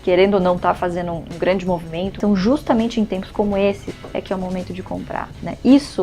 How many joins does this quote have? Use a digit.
3